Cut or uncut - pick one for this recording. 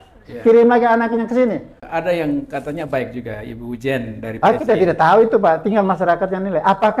cut